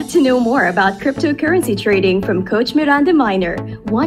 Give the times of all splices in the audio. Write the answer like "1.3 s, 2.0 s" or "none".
none